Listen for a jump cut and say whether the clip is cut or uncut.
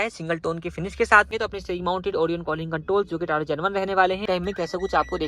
cut